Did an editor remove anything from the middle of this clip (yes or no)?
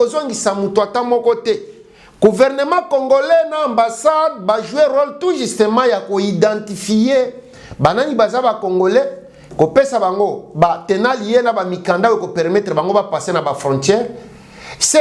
no